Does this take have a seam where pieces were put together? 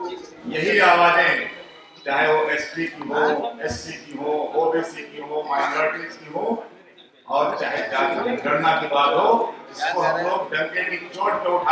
no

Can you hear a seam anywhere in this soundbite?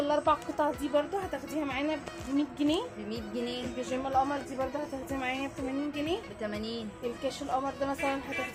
no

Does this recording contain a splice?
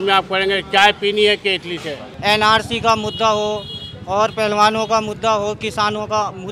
yes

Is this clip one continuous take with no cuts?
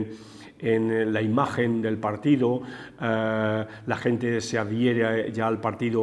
yes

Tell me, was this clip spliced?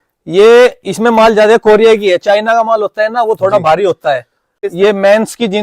yes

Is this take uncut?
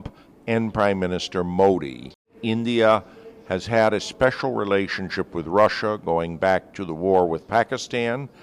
no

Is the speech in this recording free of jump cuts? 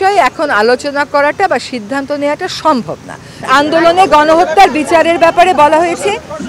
no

